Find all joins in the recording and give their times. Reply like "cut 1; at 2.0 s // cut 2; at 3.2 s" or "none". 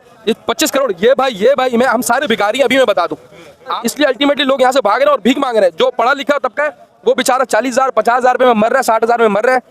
cut 1; at 3.8 s